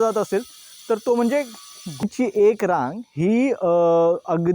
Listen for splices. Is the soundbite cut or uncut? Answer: cut